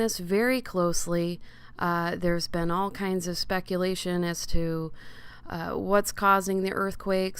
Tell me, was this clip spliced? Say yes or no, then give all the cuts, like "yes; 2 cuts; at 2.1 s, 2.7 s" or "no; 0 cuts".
yes; 1 cut; at 5.9 s